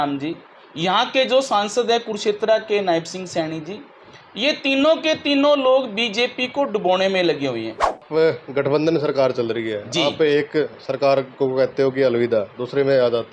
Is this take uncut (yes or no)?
no